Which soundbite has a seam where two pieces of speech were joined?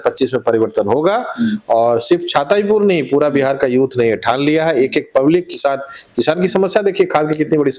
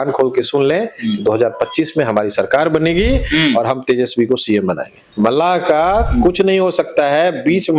second; 1 cut; at 5.0 s

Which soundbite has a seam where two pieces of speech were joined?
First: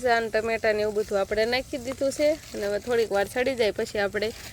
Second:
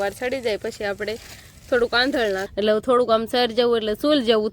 second; 1 cut; at 2.5 s

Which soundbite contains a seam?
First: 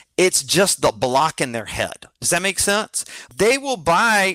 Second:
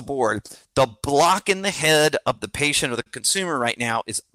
first; 1 cut; at 3.2 s

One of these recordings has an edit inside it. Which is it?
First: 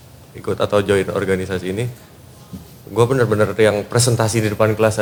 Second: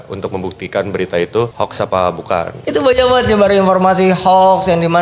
second; 2 cuts; at 1.5 s, 2.6 s

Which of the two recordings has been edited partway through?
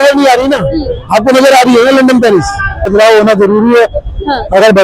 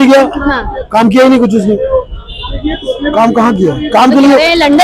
first; 1 cut; at 2.9 s

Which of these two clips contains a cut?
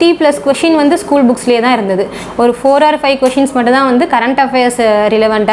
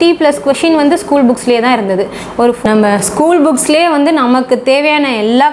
second; 1 cut; at 2.6 s

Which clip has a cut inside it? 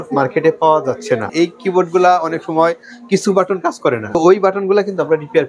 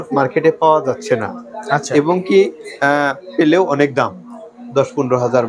first; 2 cuts; at 1.3 s, 4.0 s

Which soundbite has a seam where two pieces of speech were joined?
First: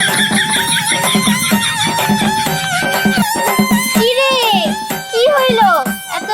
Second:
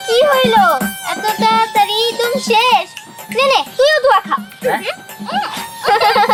first; 1 cut; at 3.2 s

